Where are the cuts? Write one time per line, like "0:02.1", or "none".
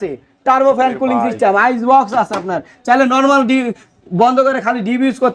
none